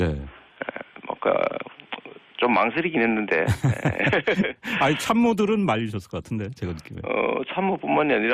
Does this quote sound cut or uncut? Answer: cut